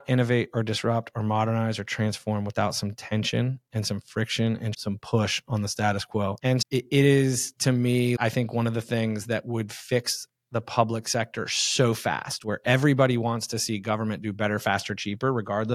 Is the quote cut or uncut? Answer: cut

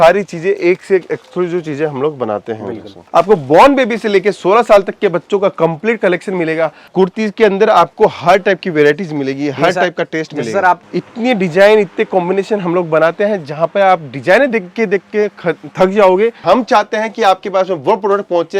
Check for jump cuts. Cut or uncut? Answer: cut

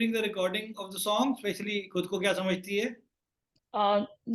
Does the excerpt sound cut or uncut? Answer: uncut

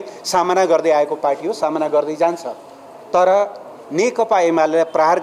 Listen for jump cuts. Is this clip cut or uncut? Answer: uncut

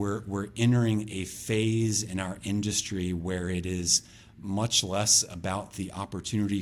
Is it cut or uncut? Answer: uncut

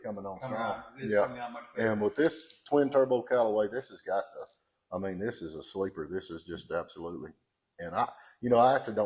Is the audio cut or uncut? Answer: uncut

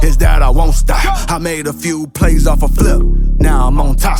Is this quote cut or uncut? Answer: uncut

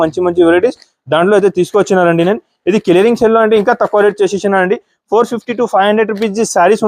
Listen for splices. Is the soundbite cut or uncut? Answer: uncut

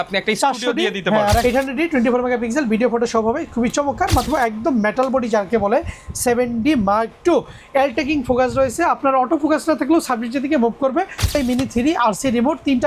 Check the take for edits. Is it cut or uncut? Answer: cut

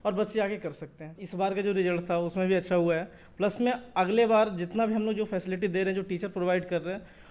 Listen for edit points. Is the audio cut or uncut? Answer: cut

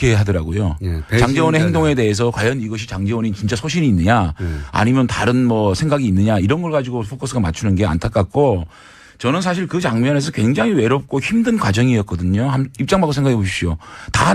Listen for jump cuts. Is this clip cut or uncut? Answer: uncut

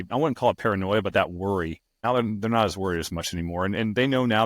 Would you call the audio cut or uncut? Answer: cut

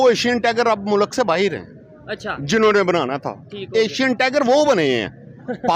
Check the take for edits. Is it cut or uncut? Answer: uncut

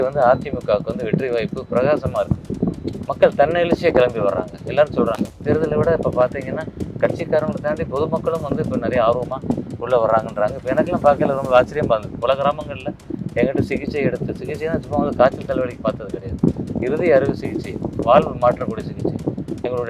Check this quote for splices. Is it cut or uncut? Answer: cut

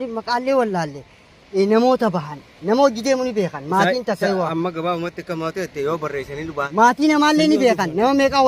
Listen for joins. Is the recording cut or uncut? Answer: cut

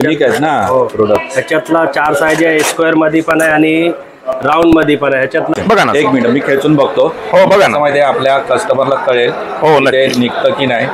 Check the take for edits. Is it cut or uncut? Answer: cut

